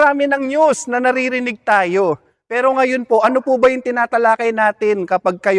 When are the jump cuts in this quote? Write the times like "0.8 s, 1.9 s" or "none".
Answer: none